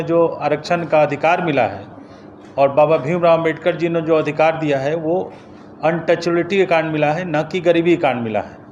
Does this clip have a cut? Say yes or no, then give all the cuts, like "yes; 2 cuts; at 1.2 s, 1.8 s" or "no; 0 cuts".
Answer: no; 0 cuts